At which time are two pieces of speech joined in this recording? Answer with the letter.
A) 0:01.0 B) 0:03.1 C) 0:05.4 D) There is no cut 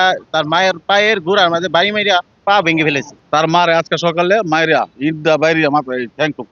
B